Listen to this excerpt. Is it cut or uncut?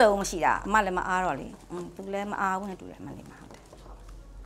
uncut